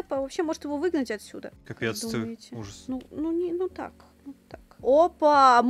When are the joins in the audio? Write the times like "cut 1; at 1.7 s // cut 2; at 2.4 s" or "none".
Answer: none